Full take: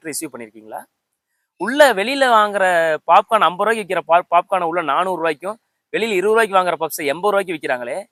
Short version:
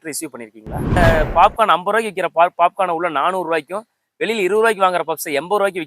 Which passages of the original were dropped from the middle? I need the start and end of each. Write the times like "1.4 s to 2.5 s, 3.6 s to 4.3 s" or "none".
1.0 s to 2.7 s